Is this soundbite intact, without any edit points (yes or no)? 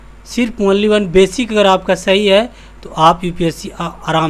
yes